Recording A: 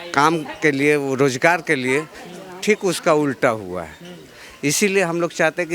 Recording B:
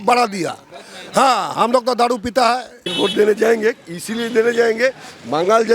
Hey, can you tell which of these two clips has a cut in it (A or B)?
B